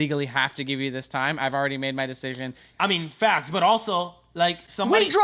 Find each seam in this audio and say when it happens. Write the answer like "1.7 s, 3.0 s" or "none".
2.7 s

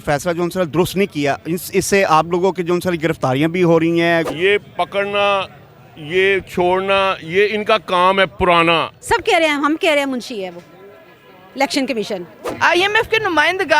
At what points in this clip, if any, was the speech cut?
4.3 s, 8.9 s, 12.4 s

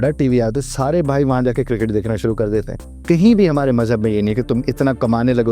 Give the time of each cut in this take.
2.9 s

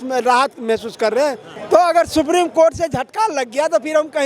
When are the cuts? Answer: 1.5 s

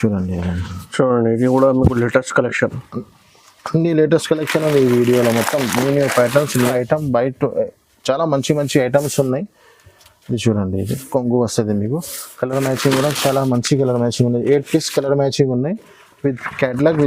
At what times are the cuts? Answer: 6.7 s

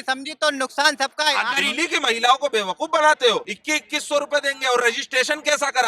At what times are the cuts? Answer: 1.5 s, 3.6 s

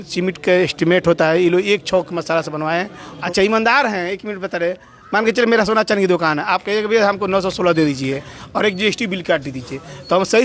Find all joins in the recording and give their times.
3.0 s

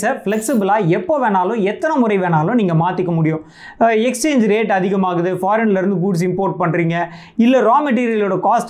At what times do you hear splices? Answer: none

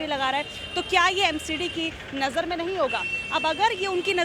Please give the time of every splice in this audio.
none

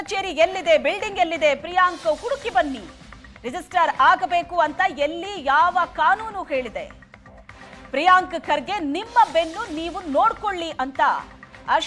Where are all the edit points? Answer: none

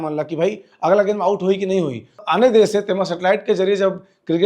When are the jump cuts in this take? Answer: 2.2 s

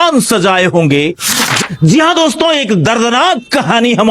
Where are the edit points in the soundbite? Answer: 1.4 s

